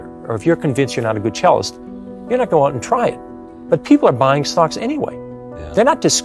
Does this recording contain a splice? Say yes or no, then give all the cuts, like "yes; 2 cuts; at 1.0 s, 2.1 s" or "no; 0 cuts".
no; 0 cuts